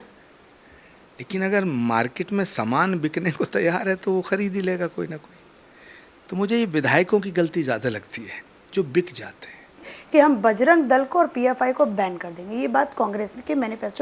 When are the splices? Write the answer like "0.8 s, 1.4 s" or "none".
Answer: 9.9 s